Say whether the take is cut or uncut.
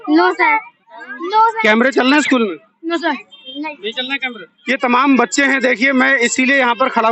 cut